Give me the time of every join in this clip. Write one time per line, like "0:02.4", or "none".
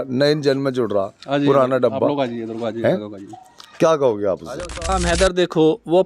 0:05.0